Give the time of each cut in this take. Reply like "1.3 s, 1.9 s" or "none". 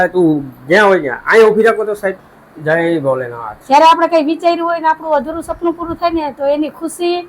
2.5 s

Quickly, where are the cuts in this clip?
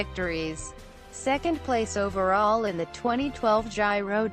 1.9 s

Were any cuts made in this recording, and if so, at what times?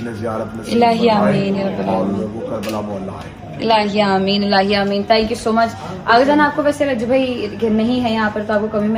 none

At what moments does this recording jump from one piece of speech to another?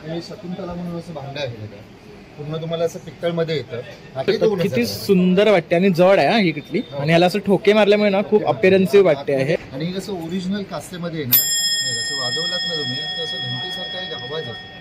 4.2 s, 9.6 s

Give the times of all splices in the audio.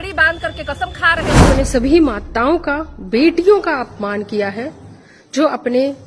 1.4 s

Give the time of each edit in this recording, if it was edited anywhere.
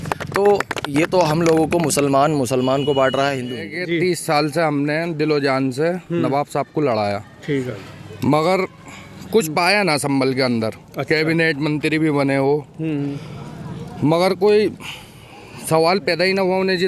3.7 s

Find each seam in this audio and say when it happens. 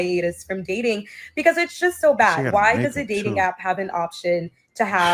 none

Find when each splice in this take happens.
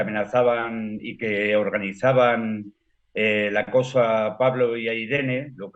none

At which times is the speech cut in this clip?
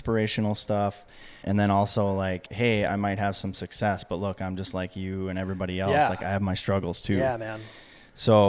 1.4 s, 2.5 s

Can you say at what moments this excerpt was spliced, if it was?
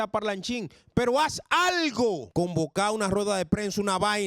2.2 s

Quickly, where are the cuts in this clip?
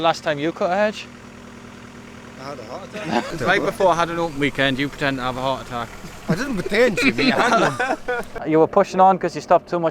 3.3 s, 8.3 s

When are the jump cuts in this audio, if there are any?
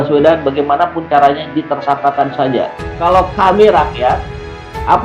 2.8 s

